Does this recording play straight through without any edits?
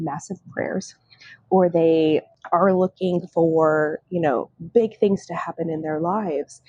no; 1 cut; at 2.4 s

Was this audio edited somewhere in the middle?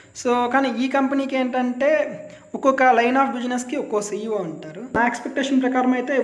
yes; 1 cut; at 4.9 s

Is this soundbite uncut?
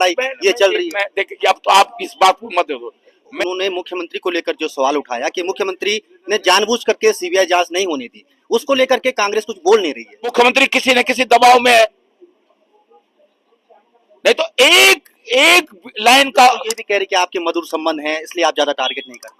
no; 2 cuts; at 3.3 s, 10.3 s

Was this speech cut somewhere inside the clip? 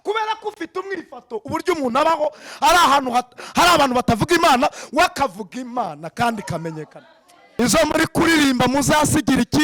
yes; 1 cut; at 7.6 s

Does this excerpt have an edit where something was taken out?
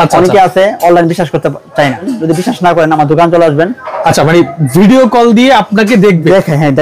yes; 1 cut; at 2.1 s

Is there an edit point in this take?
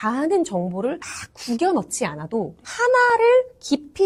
no; 0 cuts

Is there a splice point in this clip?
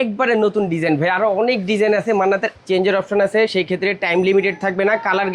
yes; 1 cut; at 2.5 s

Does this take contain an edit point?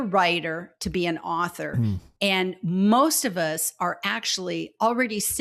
no; 0 cuts

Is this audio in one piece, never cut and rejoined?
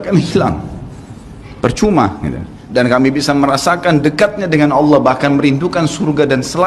no; 1 cut; at 2.5 s

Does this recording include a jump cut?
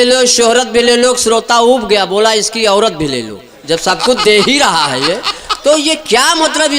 no; 0 cuts

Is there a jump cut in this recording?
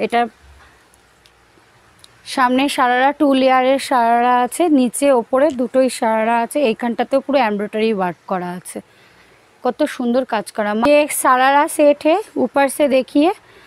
yes; 1 cut; at 10.8 s

